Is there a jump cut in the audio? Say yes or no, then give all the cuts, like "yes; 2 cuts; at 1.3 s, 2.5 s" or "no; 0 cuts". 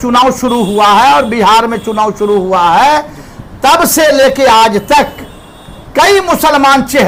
no; 0 cuts